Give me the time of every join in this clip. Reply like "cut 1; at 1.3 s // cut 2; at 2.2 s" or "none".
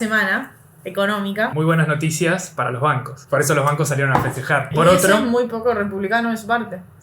cut 1; at 1.5 s // cut 2; at 3.1 s // cut 3; at 4.7 s